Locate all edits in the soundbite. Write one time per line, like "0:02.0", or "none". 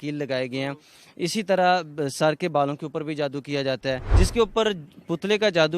0:04.1